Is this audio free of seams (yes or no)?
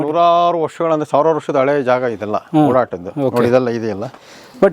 yes